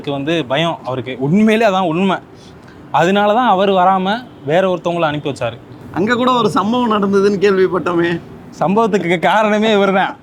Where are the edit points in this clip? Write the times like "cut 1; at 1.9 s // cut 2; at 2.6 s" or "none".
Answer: none